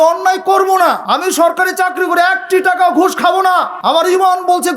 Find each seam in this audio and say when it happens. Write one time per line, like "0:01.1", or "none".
0:01.0
0:03.7